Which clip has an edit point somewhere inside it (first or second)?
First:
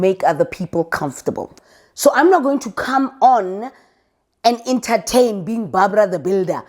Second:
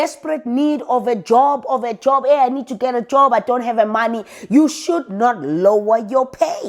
first